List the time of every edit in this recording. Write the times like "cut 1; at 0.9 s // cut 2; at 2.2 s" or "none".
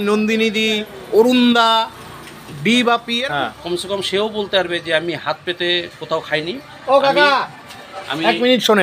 cut 1; at 3.2 s